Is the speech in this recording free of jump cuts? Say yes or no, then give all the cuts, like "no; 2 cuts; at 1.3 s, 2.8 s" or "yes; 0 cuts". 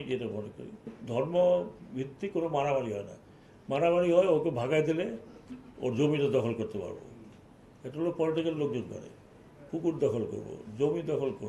no; 1 cut; at 0.9 s